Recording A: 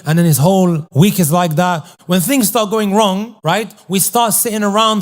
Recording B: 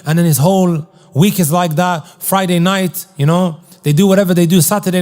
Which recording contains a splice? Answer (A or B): A